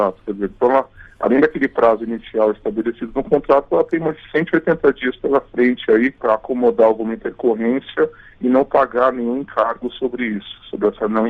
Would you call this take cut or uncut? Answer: cut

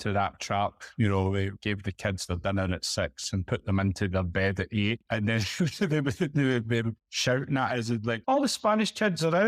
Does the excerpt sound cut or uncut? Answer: cut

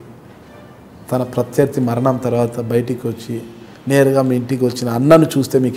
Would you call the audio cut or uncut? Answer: uncut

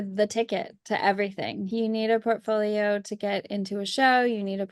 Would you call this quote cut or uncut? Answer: cut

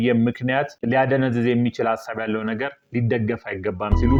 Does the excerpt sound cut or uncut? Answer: uncut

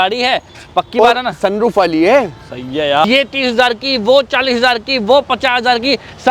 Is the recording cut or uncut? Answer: cut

